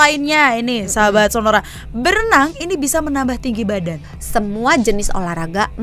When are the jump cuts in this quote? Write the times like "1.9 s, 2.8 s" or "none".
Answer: 4.1 s